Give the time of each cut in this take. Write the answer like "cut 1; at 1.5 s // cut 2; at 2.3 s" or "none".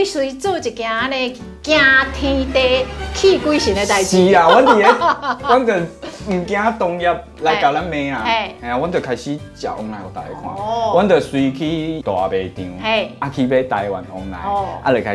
none